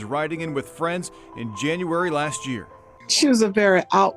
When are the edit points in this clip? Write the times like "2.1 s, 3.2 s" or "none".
3.0 s